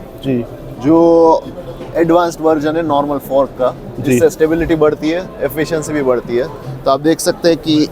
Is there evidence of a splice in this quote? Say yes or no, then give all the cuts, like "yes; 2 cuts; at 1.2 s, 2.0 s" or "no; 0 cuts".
yes; 1 cut; at 6.6 s